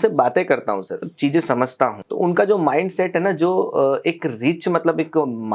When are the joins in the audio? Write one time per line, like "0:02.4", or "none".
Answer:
0:01.0
0:02.0